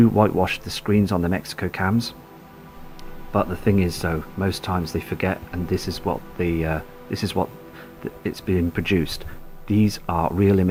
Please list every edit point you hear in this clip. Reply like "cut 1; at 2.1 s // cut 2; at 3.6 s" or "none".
none

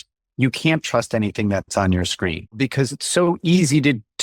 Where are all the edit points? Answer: cut 1; at 2.6 s

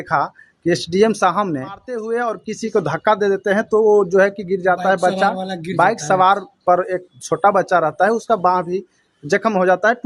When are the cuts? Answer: cut 1; at 1.9 s

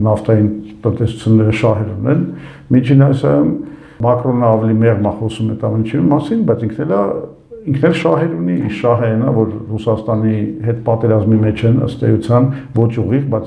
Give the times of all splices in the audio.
none

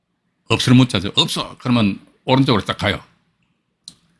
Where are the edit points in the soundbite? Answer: none

